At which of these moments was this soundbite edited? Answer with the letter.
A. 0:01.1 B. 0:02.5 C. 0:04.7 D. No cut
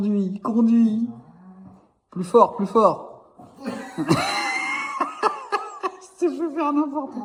D